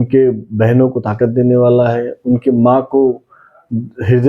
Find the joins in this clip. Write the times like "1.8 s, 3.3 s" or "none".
none

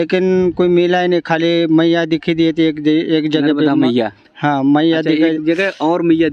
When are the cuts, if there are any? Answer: none

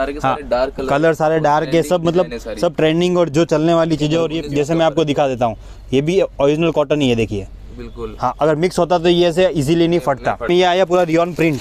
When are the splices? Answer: 4.4 s, 10.5 s

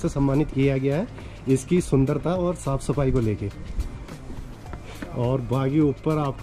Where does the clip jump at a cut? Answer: none

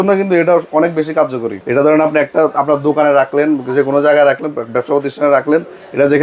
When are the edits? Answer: 1.6 s

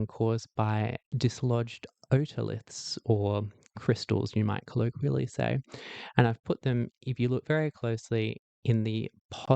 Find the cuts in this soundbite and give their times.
1.0 s

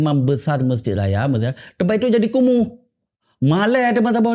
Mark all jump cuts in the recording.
none

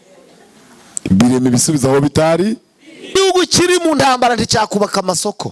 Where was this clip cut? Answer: 3.1 s

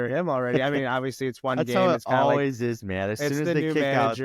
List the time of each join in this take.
none

